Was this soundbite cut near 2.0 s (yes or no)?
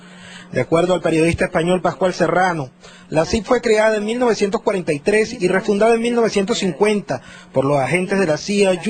yes